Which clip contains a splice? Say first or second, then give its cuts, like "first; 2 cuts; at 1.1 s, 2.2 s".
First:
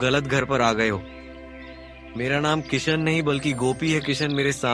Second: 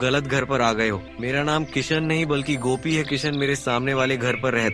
second; 1 cut; at 1.1 s